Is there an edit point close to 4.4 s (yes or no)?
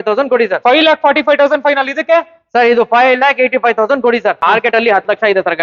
yes